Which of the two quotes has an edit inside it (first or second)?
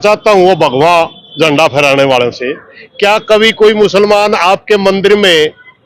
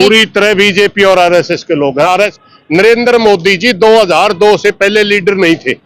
second